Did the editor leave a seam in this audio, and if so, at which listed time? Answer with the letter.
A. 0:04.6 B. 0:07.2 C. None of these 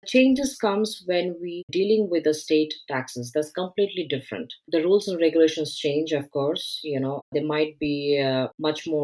A